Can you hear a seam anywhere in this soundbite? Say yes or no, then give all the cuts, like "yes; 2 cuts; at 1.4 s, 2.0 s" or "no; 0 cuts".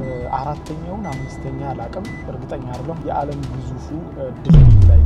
no; 0 cuts